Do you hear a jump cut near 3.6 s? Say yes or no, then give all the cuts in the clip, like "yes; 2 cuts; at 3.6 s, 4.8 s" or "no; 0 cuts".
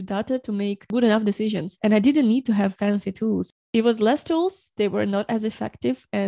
yes; 1 cut; at 3.6 s